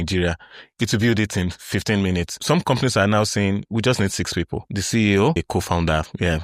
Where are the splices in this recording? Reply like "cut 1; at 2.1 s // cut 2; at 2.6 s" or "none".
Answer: cut 1; at 2.4 s // cut 2; at 4.6 s // cut 3; at 5.4 s

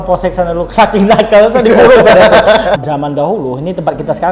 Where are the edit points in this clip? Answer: cut 1; at 2.8 s

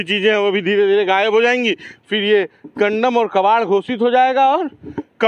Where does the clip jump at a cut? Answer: none

